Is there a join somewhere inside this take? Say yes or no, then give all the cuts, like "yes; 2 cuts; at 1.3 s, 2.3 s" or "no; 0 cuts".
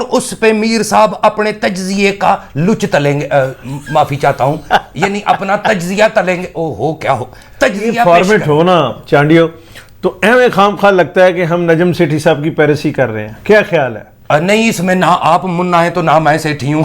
yes; 1 cut; at 8.0 s